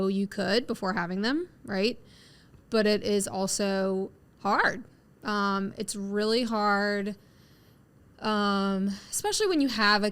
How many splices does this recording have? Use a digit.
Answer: 0